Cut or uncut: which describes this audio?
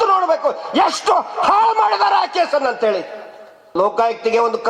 cut